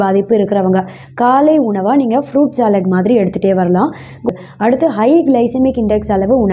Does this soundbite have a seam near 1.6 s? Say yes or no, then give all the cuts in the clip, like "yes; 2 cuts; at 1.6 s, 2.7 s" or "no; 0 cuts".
no; 1 cut; at 4.3 s